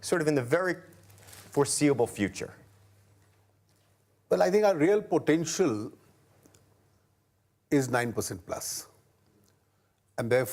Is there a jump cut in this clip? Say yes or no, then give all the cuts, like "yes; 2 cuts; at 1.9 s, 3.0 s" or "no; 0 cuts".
no; 0 cuts